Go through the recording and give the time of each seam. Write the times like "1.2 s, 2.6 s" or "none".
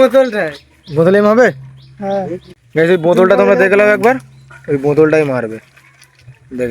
2.4 s